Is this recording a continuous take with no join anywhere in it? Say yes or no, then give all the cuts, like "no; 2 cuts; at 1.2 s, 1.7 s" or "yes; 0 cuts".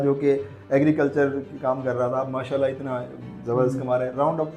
yes; 0 cuts